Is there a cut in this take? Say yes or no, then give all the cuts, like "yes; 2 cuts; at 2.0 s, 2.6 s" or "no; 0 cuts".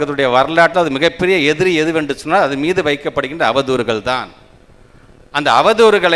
no; 0 cuts